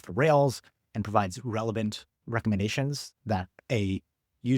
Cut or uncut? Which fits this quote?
cut